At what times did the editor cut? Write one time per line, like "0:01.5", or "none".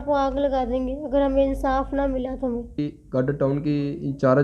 0:02.8

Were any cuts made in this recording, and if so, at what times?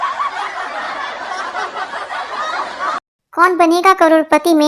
0:02.8

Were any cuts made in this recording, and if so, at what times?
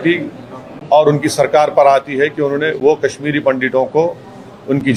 none

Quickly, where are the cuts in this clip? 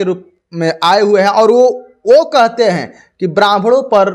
none

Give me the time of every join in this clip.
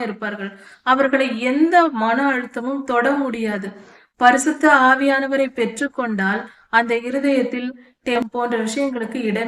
0:08.2

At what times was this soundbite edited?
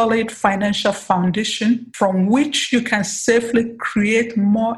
0:01.9

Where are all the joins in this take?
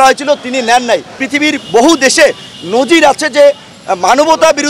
0:01.1

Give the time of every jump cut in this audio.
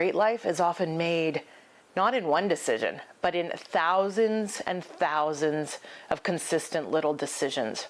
none

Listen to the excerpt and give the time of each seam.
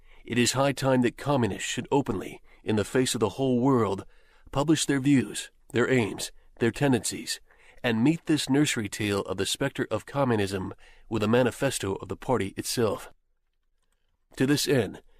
0:11.8

